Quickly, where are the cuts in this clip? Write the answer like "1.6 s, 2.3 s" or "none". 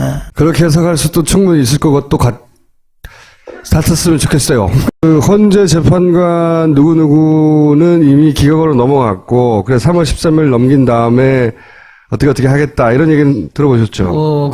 4.0 s

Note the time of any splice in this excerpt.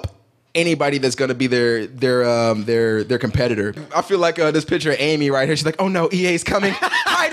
3.8 s

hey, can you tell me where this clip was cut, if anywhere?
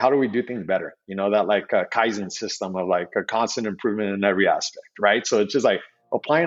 none

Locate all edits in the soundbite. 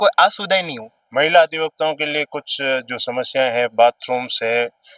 1.0 s

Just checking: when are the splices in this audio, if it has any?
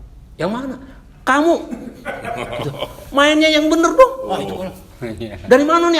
none

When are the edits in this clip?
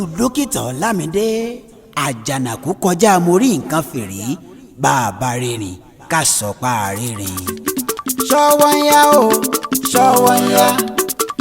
6.9 s

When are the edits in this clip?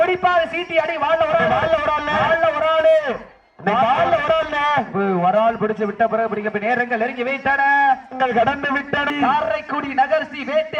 9.1 s

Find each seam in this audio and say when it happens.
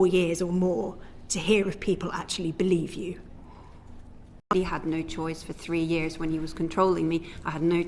4.5 s

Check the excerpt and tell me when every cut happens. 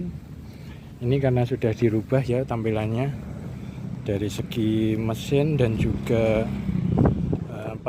none

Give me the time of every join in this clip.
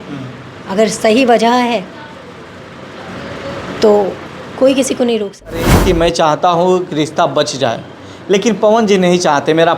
5.7 s

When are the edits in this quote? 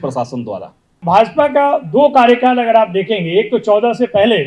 1.0 s

